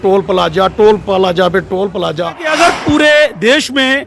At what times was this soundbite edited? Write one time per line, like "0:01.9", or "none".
0:02.5